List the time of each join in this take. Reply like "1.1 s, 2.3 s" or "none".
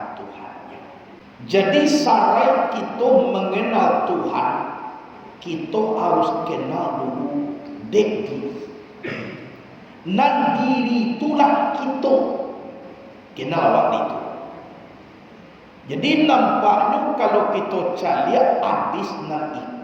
1.2 s